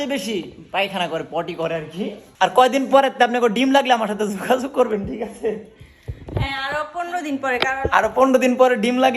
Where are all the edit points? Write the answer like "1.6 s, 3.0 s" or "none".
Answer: 2.2 s